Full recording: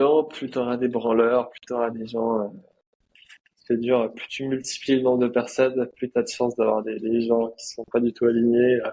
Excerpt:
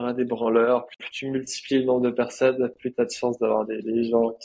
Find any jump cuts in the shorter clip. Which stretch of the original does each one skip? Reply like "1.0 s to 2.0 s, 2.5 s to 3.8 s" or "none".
1.6 s to 4.2 s